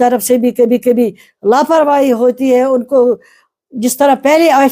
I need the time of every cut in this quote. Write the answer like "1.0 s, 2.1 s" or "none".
none

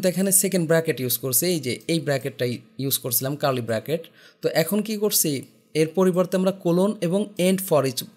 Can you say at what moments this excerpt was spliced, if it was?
none

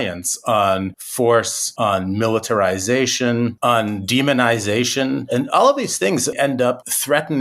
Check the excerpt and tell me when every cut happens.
1.0 s, 1.6 s, 3.6 s, 5.2 s, 6.6 s

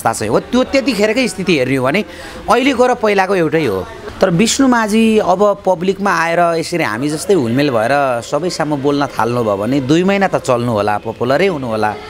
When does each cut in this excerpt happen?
4.0 s

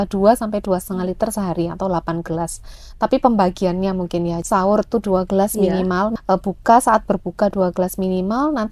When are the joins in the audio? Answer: 4.4 s, 6.1 s

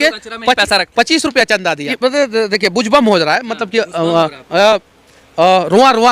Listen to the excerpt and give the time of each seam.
1.9 s

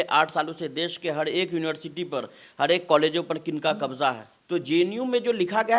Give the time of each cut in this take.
4.3 s

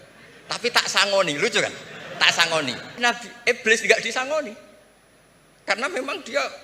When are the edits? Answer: 3.0 s

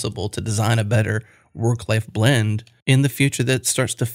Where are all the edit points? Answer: 2.7 s

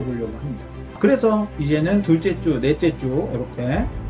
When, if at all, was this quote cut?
0.9 s

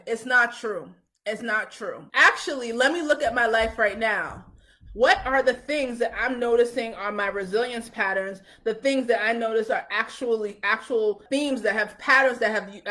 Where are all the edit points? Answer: 2.0 s

